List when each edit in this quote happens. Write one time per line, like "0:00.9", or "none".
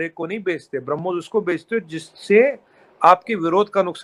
none